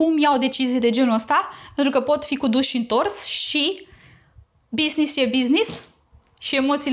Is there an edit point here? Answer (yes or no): no